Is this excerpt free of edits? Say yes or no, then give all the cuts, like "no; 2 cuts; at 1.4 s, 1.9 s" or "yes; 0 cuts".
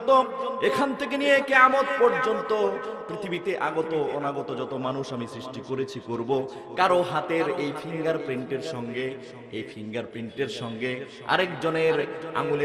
yes; 0 cuts